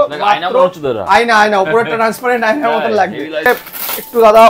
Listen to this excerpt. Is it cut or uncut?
cut